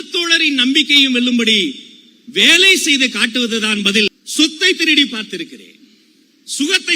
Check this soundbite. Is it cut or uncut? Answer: cut